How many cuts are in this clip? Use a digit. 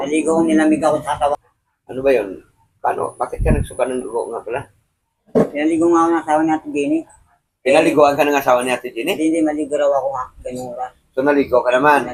0